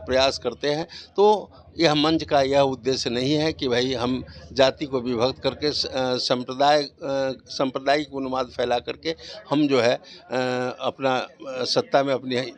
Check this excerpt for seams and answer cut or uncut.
uncut